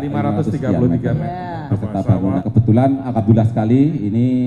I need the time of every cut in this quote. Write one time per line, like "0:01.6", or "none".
0:02.4